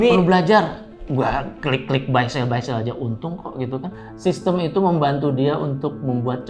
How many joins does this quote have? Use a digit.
1